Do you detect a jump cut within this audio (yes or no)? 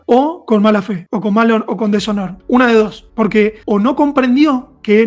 yes